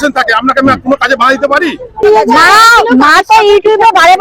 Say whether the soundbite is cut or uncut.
cut